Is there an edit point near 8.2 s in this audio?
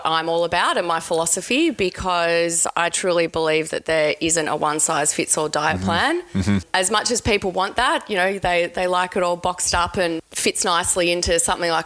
no; 2 cuts; at 6.7 s, 10.3 s

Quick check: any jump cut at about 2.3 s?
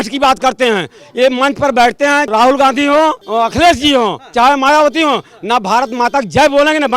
yes; 2 cuts; at 2.3 s, 3.2 s

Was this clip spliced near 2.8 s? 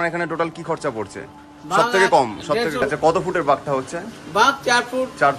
yes; 1 cut; at 2.8 s

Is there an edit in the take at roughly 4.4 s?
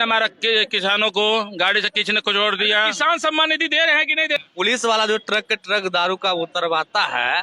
yes; 1 cut; at 4.4 s

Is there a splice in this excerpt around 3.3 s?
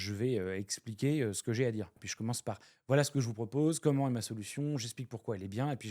no; 1 cut; at 2.0 s

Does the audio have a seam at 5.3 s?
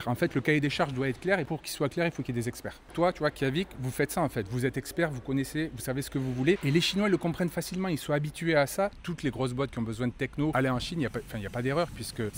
no; 4 cuts; at 2.9 s, 6.6 s, 8.9 s, 10.5 s

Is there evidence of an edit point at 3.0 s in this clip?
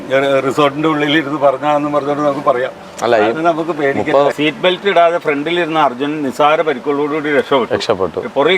no; 1 cut; at 4.3 s

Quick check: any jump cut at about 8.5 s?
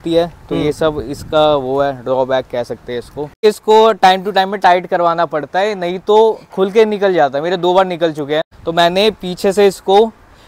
yes; 2 cuts; at 3.4 s, 8.5 s

